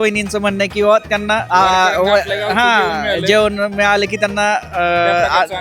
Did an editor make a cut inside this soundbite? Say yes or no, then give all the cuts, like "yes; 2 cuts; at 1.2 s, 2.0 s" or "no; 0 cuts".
yes; 1 cut; at 1.4 s